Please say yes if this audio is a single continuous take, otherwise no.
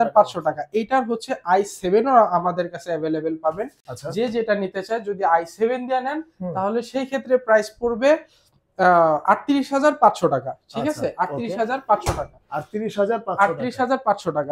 yes